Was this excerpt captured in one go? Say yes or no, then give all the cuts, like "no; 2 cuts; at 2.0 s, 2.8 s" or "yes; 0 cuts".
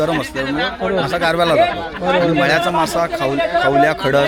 yes; 0 cuts